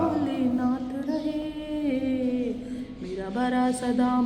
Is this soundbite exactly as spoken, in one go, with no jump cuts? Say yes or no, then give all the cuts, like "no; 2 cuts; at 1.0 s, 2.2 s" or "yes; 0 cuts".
yes; 0 cuts